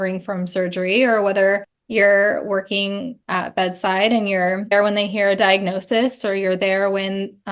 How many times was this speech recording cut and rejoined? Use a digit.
2